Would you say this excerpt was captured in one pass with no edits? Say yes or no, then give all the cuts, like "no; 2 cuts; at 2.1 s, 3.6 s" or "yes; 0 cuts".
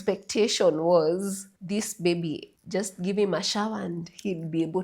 no; 2 cuts; at 1.5 s, 2.5 s